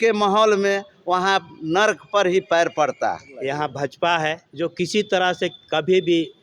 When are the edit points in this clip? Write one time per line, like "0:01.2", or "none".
0:03.3
0:04.5